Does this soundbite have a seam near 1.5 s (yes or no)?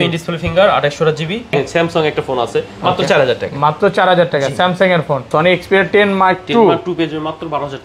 yes